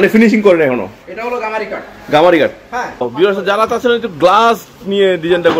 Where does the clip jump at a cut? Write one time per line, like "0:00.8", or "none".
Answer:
0:03.1